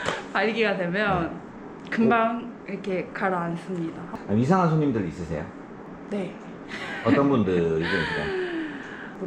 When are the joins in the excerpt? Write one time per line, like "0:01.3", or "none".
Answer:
0:04.1